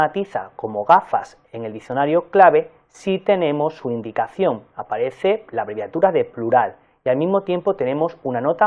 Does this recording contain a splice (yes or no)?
yes